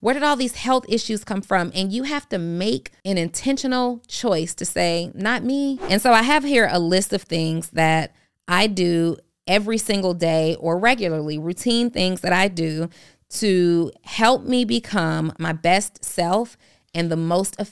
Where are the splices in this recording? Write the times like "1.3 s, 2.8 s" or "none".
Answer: 2.9 s, 5.8 s, 15.3 s